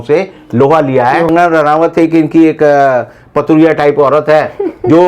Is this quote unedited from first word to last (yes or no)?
no